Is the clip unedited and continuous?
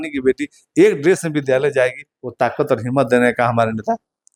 yes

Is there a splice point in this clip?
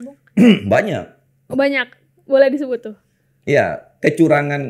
no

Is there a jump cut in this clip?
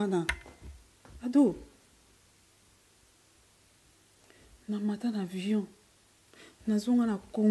no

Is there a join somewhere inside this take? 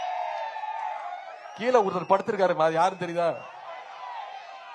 no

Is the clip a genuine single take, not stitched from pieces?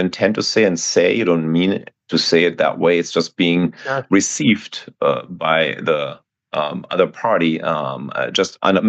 yes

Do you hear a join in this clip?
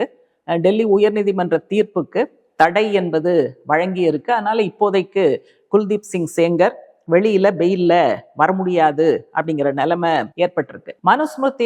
yes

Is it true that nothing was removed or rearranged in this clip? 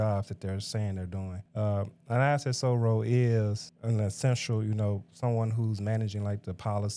no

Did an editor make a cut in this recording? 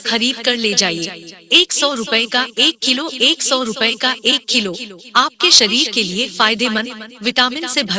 no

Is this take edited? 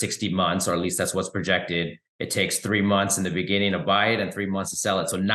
no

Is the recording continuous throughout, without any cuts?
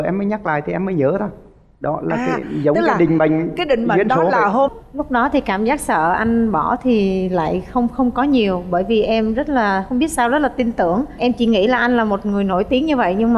no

